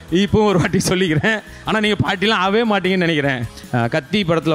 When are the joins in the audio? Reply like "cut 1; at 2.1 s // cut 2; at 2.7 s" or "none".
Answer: cut 1; at 3.5 s